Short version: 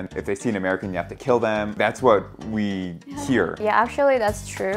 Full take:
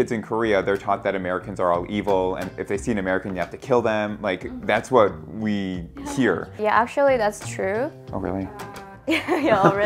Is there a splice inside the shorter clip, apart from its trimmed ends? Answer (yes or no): yes